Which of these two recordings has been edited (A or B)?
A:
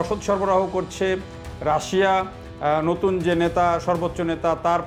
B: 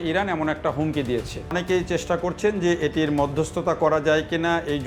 B